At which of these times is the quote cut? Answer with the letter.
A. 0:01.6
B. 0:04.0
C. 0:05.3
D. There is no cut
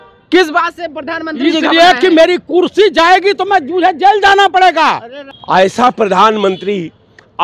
D